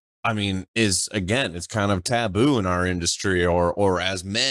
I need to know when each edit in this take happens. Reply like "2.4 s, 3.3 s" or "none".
none